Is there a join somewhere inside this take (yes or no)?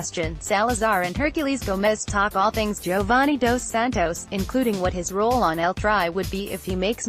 yes